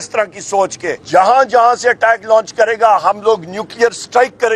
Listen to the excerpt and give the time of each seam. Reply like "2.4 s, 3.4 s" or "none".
1.0 s